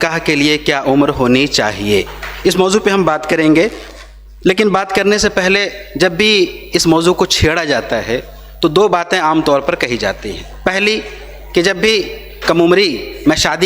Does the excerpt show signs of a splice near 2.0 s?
no; 0 cuts

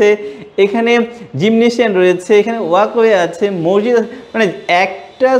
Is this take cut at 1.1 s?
no; 0 cuts

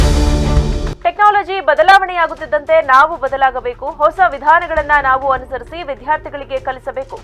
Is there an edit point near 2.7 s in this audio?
no; 1 cut; at 0.9 s

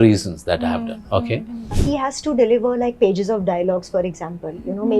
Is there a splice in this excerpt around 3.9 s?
no; 1 cut; at 1.8 s

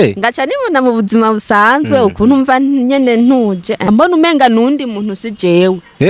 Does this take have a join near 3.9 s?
yes; 1 cut; at 3.9 s

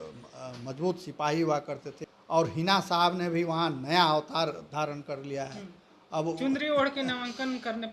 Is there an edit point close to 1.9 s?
yes; 1 cut; at 1.9 s

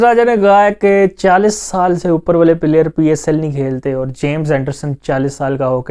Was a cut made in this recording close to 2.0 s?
no; 1 cut; at 3.8 s

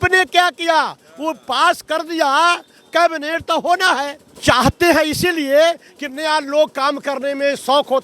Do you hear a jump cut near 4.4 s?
yes; 1 cut; at 4.4 s

